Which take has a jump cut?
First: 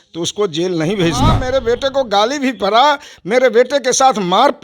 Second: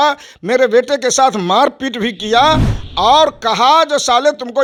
first; 1 cut; at 1.4 s

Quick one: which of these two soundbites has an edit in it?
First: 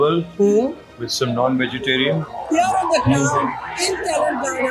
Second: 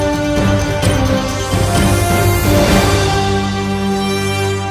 first; 1 cut; at 2.3 s

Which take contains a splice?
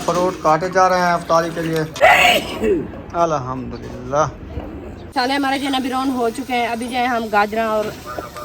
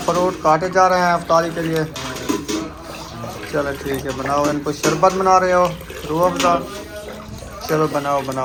first; 2 cuts; at 2.0 s, 5.1 s

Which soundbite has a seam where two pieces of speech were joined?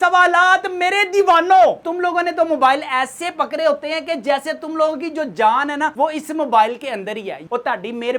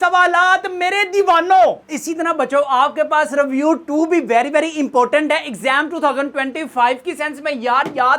first; 2 cuts; at 1.9 s, 7.4 s

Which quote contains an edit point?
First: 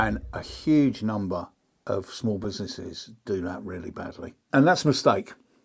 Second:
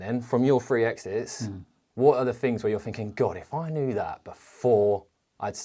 first; 1 cut; at 4.4 s

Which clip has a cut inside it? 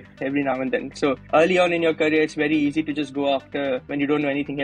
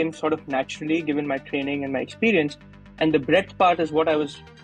first; 2 cuts; at 0.9 s, 3.9 s

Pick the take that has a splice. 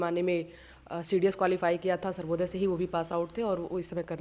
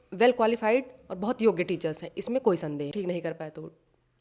second; 1 cut; at 2.9 s

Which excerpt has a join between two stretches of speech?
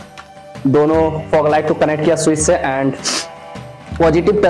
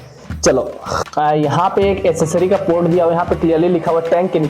second; 1 cut; at 1.0 s

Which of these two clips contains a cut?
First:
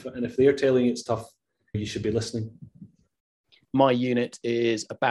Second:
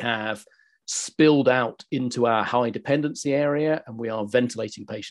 first; 2 cuts; at 1.8 s, 3.5 s

